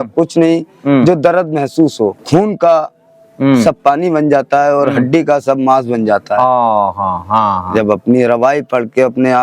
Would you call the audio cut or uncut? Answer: cut